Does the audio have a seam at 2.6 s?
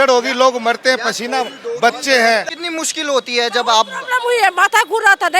yes; 1 cut; at 2.6 s

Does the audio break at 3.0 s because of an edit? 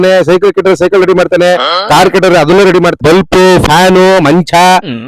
yes; 1 cut; at 3.0 s

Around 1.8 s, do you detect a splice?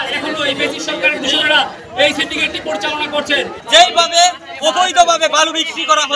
no; 1 cut; at 3.6 s

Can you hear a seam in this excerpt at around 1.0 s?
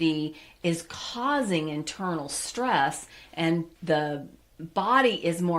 no; 1 cut; at 3.7 s

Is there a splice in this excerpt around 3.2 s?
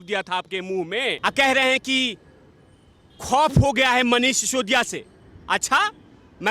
no; 1 cut; at 1.2 s

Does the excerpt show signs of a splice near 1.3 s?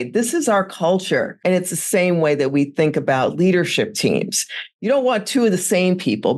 yes; 1 cut; at 1.3 s

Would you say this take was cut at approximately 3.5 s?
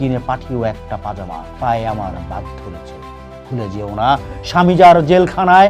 no; 1 cut; at 1.4 s

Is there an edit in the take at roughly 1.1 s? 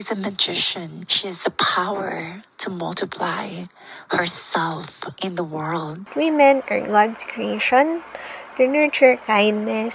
yes; 3 cuts; at 1.1 s, 5.0 s, 6.1 s

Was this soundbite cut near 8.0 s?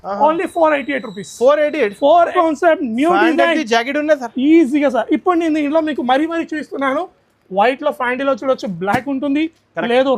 no; 1 cut; at 2.3 s

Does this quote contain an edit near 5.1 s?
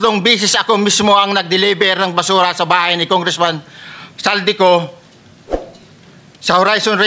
no; 0 cuts

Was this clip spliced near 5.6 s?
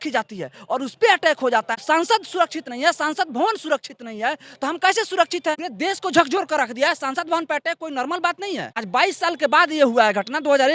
yes; 2 cuts; at 1.8 s, 5.6 s

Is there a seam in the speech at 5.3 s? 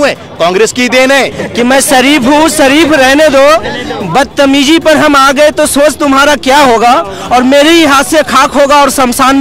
no; 1 cut; at 1.4 s

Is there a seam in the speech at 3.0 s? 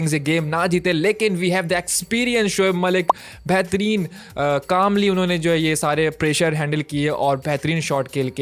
no; 0 cuts

